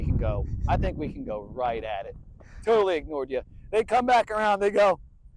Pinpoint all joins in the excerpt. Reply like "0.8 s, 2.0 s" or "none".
none